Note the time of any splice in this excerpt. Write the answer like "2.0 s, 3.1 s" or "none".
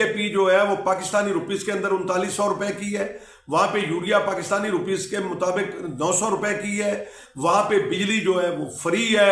none